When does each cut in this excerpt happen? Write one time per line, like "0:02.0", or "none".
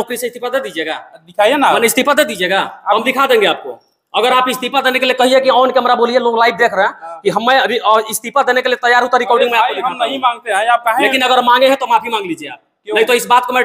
none